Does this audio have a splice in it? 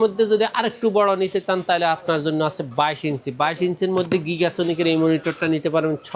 no; 0 cuts

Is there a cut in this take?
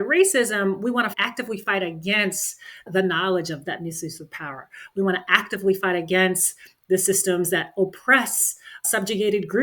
yes; 2 cuts; at 1.2 s, 3.7 s

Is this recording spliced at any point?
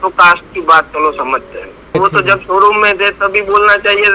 yes; 1 cut; at 1.7 s

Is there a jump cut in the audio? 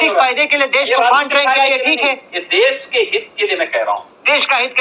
no; 0 cuts

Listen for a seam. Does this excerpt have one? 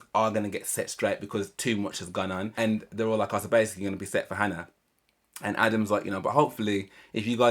yes; 1 cut; at 2.5 s

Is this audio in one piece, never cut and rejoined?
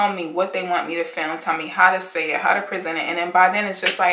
yes; 0 cuts

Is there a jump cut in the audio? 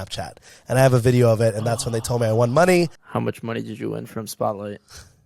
yes; 1 cut; at 3.0 s

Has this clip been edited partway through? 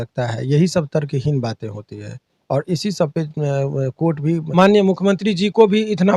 yes; 1 cut; at 4.4 s

